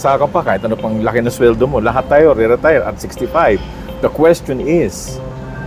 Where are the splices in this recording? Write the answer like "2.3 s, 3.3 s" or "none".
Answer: none